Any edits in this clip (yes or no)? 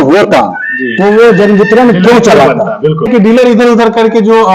yes